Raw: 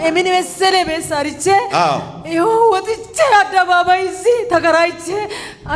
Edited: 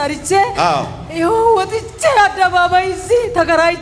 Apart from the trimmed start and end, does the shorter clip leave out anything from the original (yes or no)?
no